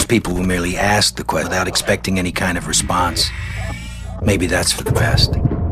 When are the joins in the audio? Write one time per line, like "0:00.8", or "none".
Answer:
0:01.5